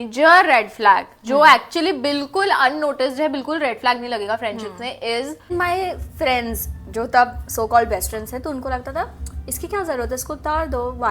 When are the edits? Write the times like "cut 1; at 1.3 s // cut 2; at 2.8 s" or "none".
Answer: cut 1; at 5.5 s